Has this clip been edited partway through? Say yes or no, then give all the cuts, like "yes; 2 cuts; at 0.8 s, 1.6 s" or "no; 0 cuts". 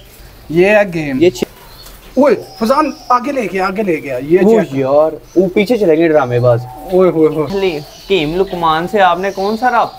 yes; 2 cuts; at 1.4 s, 7.5 s